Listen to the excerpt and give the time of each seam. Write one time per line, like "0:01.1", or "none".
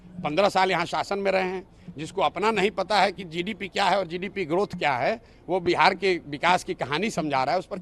none